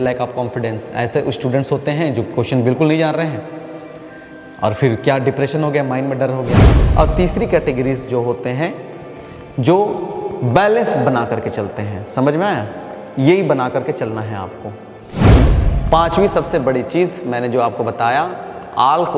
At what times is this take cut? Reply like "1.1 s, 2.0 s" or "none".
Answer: 6.7 s, 15.4 s